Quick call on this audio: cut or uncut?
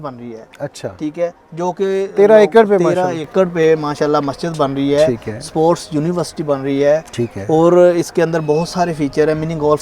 uncut